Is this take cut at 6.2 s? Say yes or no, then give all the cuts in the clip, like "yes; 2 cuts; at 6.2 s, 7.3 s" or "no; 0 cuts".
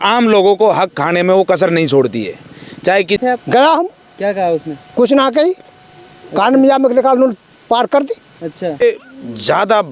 no; 2 cuts; at 3.2 s, 8.8 s